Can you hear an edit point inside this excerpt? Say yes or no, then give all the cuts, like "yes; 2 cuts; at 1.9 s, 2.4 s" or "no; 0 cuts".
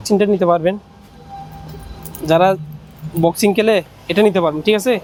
no; 0 cuts